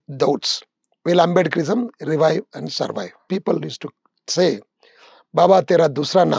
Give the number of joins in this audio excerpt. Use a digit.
1